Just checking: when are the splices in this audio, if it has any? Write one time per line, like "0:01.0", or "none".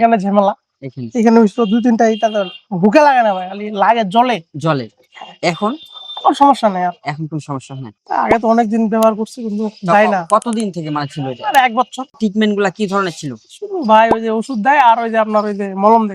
0:07.9
0:12.1